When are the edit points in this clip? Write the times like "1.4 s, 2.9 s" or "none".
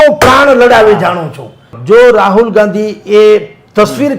1.7 s